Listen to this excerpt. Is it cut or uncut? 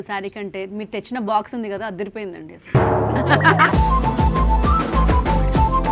uncut